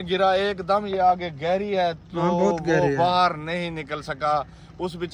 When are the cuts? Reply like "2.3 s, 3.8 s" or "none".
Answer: none